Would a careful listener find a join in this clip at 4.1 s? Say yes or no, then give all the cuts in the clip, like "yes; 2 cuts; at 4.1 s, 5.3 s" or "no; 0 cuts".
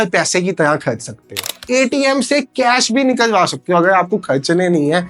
no; 1 cut; at 1.5 s